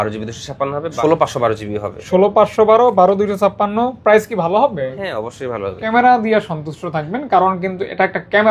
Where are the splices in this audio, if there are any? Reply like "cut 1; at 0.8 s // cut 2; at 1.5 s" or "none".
cut 1; at 0.9 s // cut 2; at 5.8 s

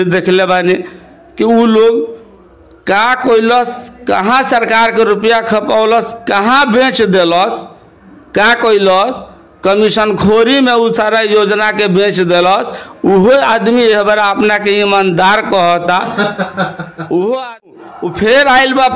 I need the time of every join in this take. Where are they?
cut 1; at 17.8 s

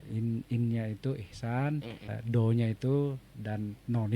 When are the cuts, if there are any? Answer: cut 1; at 2.1 s

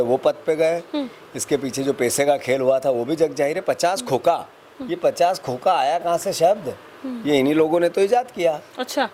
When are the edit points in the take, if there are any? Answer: none

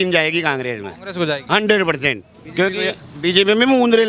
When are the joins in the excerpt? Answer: none

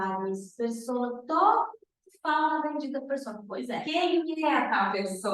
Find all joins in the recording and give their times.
none

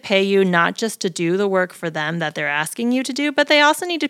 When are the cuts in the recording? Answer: none

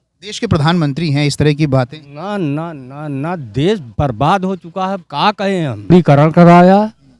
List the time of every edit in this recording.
cut 1; at 5.9 s

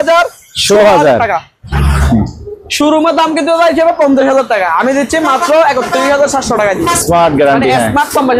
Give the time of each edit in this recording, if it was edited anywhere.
cut 1; at 1.6 s // cut 2; at 7.0 s

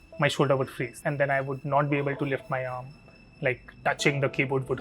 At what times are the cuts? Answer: cut 1; at 1.0 s

